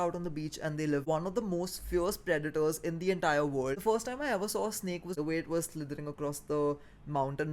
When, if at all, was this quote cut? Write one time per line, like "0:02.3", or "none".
0:01.0
0:03.8
0:05.1